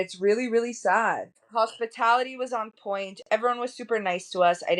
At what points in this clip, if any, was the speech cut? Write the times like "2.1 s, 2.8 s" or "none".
1.4 s